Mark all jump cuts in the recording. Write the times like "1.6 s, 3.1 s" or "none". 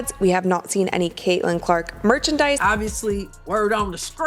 2.6 s